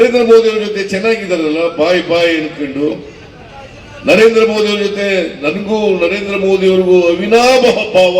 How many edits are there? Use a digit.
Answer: 0